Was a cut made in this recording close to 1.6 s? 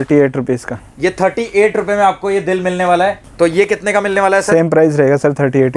no; 1 cut; at 3.2 s

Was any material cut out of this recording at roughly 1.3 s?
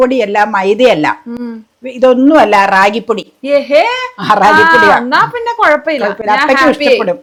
no; 0 cuts

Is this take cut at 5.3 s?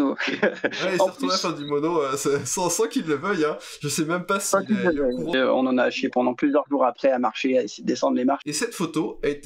yes; 2 cuts; at 5.3 s, 8.4 s

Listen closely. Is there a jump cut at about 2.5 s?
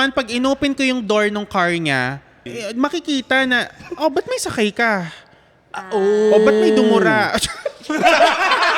yes; 1 cut; at 2.5 s

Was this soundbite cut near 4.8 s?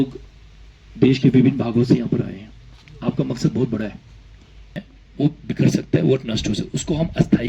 yes; 1 cut; at 4.8 s

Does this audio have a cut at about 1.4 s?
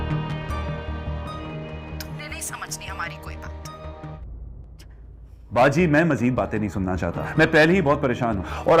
yes; 1 cut; at 1.4 s

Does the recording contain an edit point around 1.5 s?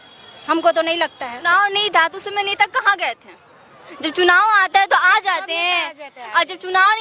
yes; 1 cut; at 1.5 s

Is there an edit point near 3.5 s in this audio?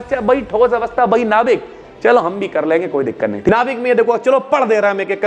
yes; 1 cut; at 3.5 s

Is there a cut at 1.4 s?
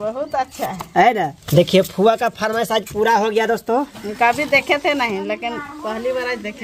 yes; 2 cuts; at 1.4 s, 3.9 s

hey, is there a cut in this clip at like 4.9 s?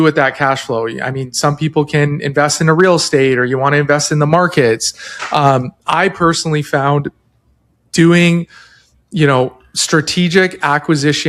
no; 0 cuts

